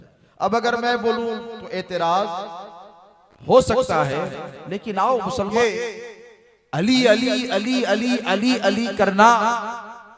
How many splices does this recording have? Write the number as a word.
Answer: one